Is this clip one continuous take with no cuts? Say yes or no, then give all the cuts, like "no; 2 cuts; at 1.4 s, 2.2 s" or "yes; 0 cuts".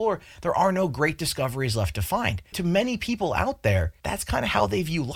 no; 2 cuts; at 2.5 s, 4.0 s